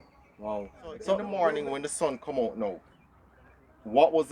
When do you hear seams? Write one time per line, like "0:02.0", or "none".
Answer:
0:01.3